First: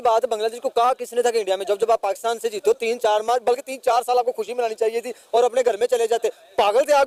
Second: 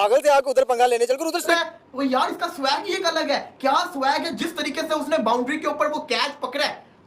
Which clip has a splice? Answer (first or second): second